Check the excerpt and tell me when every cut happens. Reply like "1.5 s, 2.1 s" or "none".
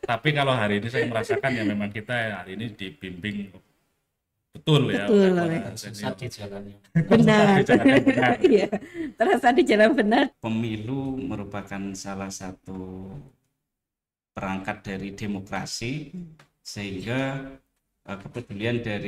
10.3 s